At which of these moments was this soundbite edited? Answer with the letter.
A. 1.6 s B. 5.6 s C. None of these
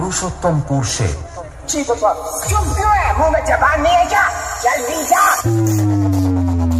C